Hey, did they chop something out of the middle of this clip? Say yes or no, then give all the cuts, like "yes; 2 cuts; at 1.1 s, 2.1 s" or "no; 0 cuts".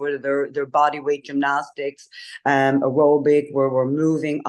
no; 0 cuts